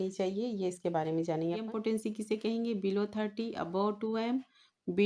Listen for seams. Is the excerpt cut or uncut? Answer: cut